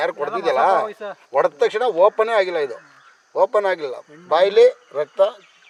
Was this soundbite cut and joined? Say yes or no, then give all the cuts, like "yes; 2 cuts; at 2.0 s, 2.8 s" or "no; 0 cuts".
no; 0 cuts